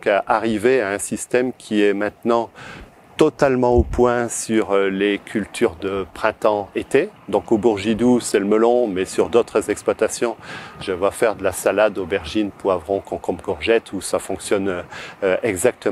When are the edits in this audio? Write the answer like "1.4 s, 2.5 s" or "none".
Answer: none